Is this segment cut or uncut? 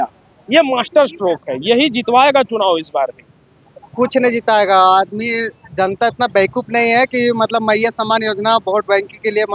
uncut